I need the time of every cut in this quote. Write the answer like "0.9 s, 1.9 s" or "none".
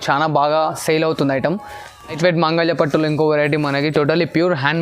2.2 s